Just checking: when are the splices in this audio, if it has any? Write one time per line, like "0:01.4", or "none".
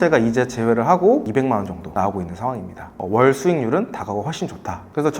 0:03.0